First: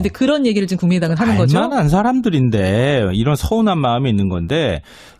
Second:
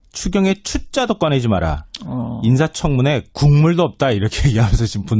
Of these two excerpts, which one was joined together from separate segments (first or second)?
first